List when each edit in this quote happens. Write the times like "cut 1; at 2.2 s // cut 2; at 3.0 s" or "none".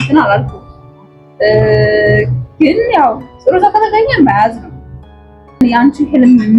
cut 1; at 5.6 s